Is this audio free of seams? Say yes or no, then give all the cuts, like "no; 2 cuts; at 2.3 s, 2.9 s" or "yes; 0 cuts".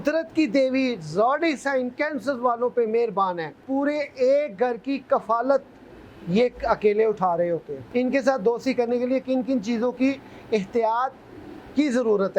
no; 2 cuts; at 3.6 s, 7.8 s